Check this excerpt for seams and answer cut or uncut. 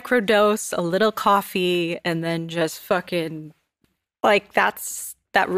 cut